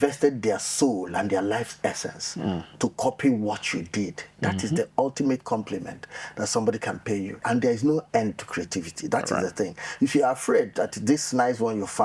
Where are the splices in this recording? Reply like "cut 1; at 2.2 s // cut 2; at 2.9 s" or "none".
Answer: cut 1; at 7.4 s